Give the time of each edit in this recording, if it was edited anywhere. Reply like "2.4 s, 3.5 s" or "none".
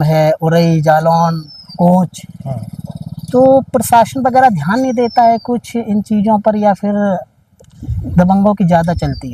none